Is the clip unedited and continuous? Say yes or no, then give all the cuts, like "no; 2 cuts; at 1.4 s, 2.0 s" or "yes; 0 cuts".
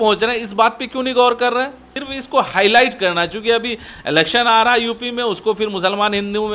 no; 1 cut; at 2.0 s